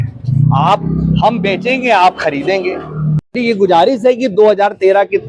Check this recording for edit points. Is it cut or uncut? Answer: cut